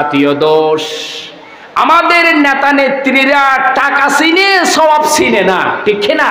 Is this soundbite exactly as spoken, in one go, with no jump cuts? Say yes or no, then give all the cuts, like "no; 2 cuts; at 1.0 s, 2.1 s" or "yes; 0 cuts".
yes; 0 cuts